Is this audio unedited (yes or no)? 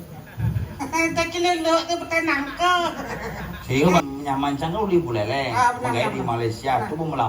no